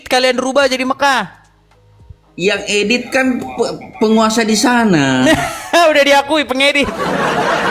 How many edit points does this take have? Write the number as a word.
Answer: zero